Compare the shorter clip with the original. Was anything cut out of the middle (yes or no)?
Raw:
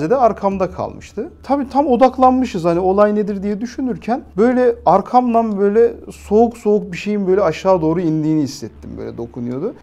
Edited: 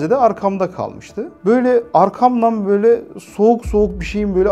yes